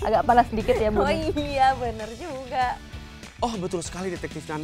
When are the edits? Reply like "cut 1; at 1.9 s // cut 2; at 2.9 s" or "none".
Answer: cut 1; at 3.3 s

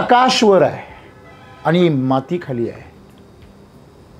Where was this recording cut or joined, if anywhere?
none

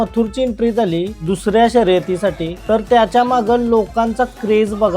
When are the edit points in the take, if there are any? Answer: none

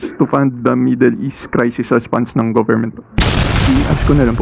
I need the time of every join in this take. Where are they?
cut 1; at 3.5 s

